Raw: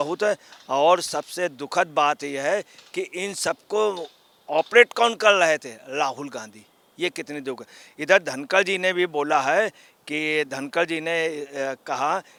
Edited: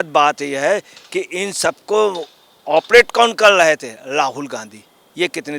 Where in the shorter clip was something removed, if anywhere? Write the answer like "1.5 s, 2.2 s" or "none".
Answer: none